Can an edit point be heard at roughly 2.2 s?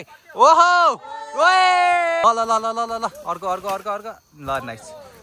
yes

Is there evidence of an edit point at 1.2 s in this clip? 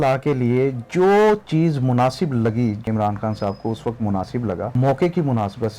no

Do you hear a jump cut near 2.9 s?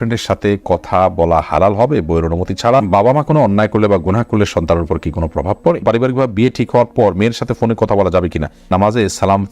yes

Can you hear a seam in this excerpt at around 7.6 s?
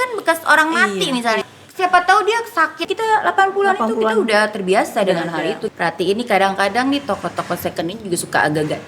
no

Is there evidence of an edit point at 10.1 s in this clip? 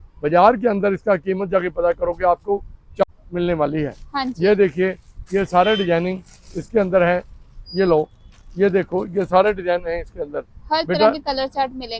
no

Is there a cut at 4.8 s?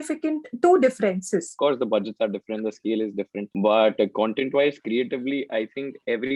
no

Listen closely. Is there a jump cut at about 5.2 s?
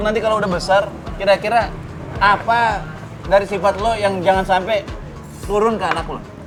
no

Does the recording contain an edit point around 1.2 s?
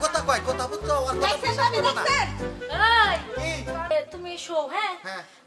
no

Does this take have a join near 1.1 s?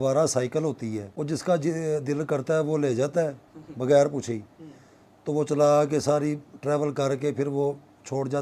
yes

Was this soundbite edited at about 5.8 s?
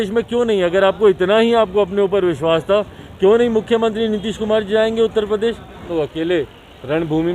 yes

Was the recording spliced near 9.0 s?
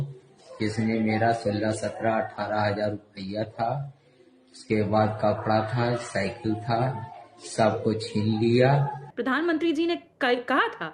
yes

